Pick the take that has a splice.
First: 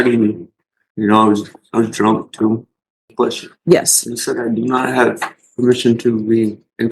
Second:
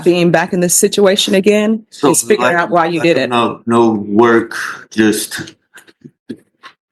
first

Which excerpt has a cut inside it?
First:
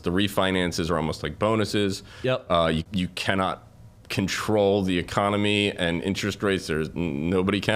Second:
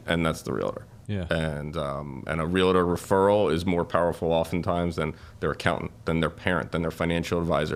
first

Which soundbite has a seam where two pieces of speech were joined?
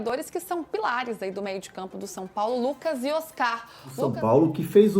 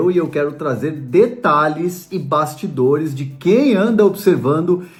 first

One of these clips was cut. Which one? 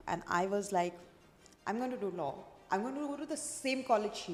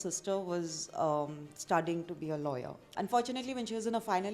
second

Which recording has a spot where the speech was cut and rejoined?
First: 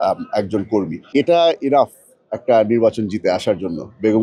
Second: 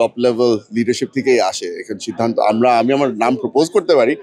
first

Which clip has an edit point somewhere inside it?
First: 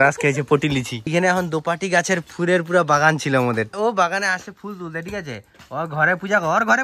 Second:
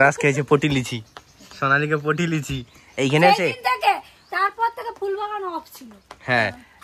first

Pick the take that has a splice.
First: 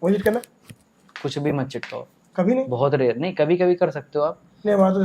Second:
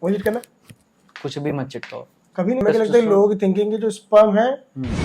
second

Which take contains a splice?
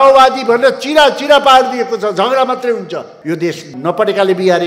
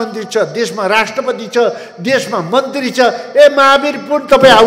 first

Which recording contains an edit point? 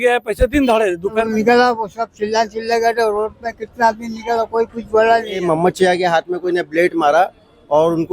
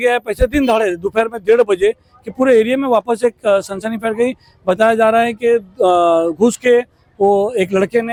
first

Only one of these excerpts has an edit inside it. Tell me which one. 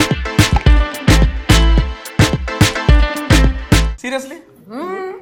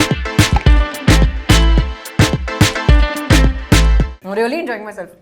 second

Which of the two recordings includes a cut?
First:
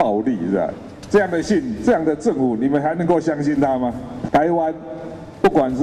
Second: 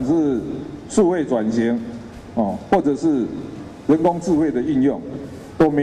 first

